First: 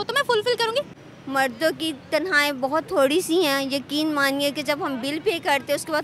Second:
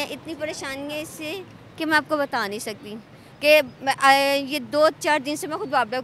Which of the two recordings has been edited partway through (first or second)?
first